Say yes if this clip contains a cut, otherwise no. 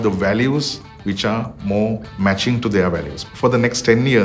yes